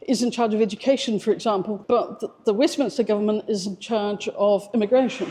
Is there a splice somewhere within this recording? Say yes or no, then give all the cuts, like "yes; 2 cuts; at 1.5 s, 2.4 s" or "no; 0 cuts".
no; 0 cuts